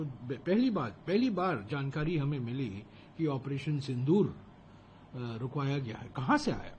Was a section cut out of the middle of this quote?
no; 0 cuts

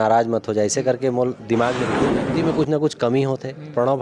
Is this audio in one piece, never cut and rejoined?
no; 1 cut; at 2.3 s

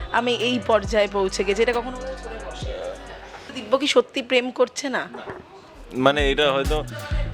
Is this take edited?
yes; 1 cut; at 3.5 s

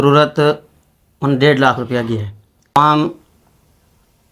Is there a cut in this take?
yes; 1 cut; at 2.7 s

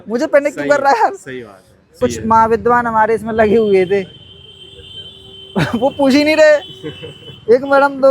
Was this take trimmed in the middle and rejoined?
yes; 1 cut; at 2.0 s

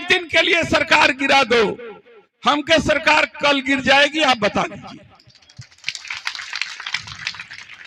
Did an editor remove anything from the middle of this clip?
no; 0 cuts

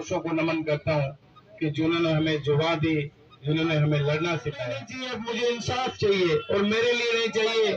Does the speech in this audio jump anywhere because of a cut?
yes; 1 cut; at 5.0 s

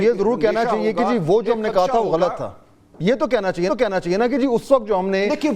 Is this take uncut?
yes; 0 cuts

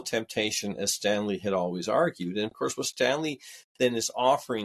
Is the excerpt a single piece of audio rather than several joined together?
yes; 0 cuts

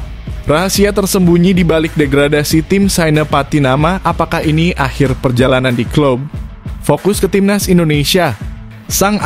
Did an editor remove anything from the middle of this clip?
no; 0 cuts

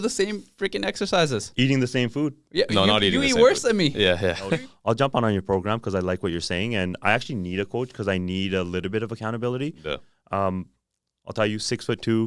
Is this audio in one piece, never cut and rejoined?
no; 1 cut; at 4.5 s

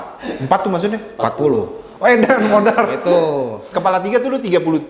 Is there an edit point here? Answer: no; 0 cuts

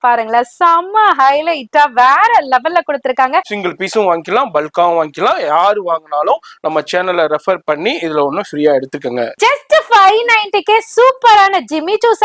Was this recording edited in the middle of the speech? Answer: yes; 2 cuts; at 3.6 s, 9.3 s

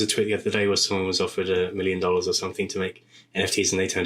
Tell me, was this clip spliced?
no; 0 cuts

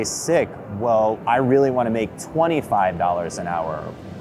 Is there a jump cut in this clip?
no; 0 cuts

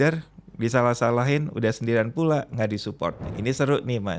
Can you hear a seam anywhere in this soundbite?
yes; 1 cut; at 3.2 s

